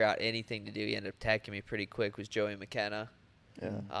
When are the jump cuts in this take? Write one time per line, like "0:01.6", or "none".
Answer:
none